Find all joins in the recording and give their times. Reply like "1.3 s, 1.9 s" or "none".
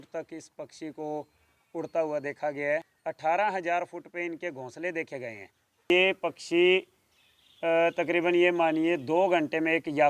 3.0 s, 5.9 s

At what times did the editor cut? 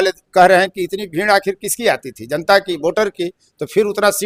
none

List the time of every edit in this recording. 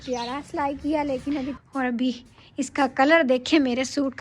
1.5 s

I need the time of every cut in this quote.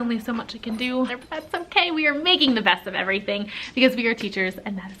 1.2 s

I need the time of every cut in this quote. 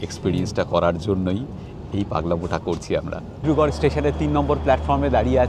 3.4 s

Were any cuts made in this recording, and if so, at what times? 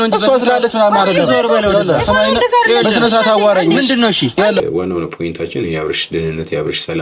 4.6 s

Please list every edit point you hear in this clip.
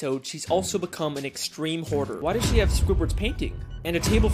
2.1 s

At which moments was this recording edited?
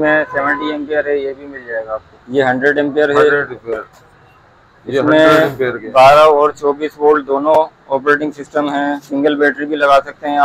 2.2 s

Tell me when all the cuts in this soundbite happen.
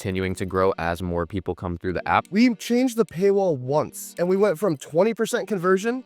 2.3 s, 4.0 s

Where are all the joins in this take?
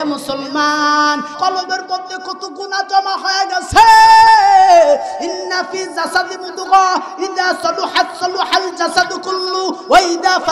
1.3 s

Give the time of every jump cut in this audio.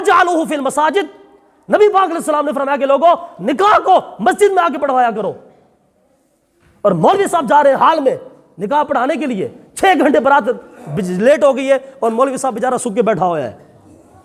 none

